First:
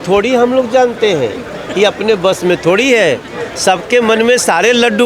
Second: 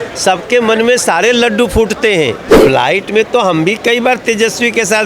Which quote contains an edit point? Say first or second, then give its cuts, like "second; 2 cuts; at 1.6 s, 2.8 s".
second; 1 cut; at 2.7 s